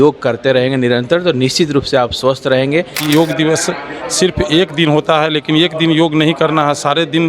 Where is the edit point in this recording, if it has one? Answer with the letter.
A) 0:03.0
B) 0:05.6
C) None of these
A